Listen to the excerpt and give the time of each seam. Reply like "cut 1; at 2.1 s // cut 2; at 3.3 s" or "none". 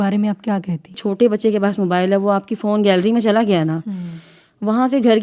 cut 1; at 1.0 s